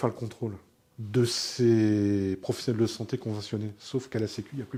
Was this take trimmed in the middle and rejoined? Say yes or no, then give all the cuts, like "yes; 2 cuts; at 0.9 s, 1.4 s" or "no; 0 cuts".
no; 0 cuts